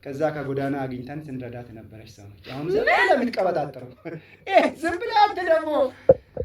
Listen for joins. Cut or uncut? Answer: uncut